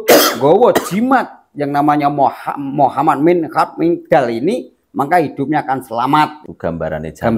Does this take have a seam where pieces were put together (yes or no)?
yes